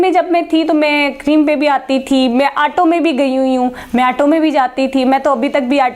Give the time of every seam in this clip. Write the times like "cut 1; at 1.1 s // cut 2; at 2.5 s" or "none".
none